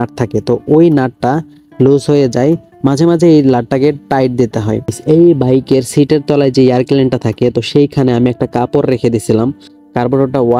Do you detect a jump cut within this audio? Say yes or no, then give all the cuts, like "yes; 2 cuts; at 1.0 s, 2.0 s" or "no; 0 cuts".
yes; 2 cuts; at 5.0 s, 9.7 s